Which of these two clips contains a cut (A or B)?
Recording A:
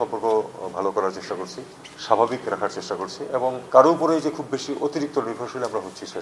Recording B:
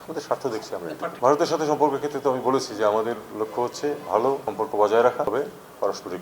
B